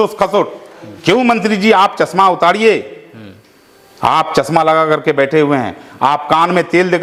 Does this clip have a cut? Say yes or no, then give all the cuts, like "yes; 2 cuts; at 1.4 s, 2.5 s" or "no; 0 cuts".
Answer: no; 0 cuts